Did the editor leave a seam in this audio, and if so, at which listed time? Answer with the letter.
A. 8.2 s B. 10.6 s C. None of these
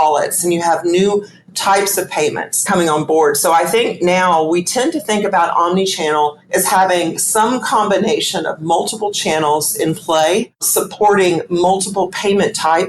B